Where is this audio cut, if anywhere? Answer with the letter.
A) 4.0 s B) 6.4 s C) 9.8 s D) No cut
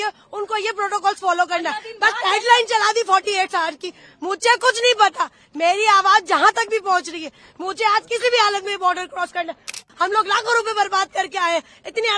C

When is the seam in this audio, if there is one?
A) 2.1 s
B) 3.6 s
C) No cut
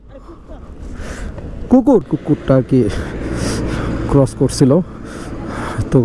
A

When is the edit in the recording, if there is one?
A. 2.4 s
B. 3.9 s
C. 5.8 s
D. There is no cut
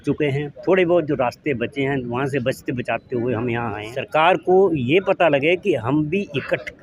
B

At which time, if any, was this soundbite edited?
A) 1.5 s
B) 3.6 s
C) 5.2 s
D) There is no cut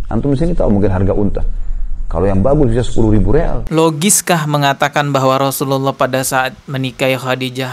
B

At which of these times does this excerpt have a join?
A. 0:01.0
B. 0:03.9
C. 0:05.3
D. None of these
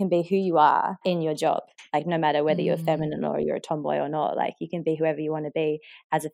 A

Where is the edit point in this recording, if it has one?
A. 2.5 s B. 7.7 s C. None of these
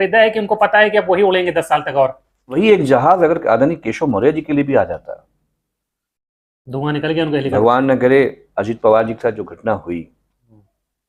A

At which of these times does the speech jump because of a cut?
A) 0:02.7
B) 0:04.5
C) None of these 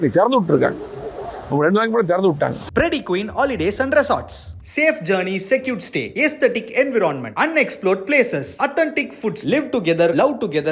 A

